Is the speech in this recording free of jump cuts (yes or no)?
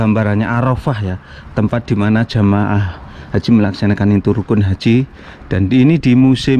yes